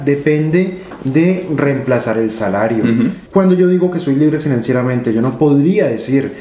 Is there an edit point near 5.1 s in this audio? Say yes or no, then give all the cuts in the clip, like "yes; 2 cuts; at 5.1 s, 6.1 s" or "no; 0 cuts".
no; 1 cut; at 3.2 s